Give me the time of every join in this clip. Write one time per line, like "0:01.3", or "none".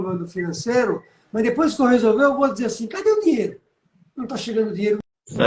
none